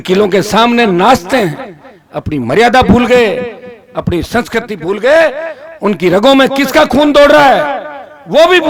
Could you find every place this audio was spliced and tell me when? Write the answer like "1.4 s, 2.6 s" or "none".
none